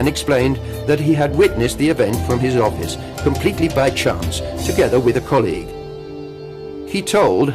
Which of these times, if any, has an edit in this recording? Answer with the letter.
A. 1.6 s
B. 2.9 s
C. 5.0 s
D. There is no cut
B